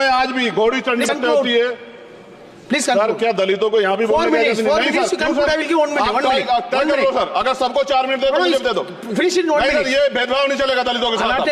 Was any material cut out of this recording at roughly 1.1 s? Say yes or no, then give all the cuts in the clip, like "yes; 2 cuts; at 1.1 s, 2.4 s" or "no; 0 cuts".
yes; 1 cut; at 1.1 s